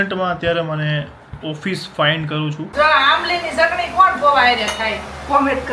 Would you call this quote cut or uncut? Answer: cut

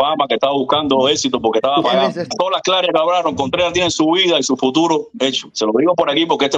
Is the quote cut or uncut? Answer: cut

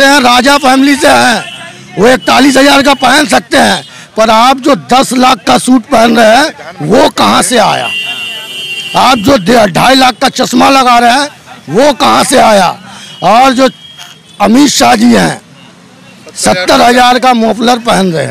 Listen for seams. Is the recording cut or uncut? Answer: uncut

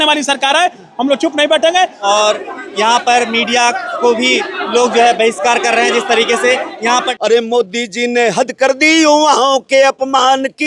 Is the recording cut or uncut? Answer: cut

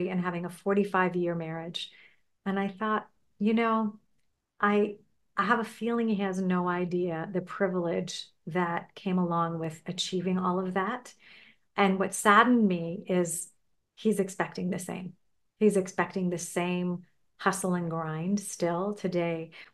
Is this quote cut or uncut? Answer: uncut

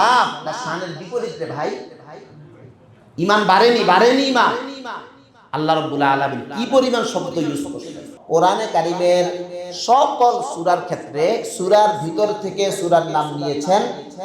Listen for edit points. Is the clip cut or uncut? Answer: cut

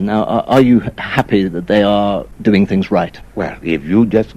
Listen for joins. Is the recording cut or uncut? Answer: cut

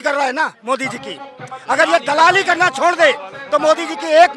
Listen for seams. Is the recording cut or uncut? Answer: uncut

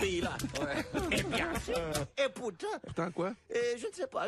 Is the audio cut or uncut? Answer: cut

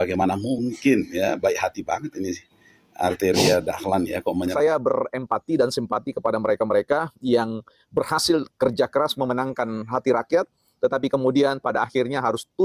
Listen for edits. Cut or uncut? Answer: cut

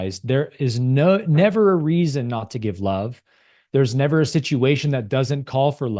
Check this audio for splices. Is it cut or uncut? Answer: uncut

